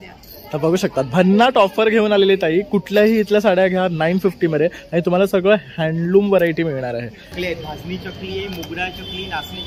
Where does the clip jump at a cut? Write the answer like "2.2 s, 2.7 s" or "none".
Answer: 7.3 s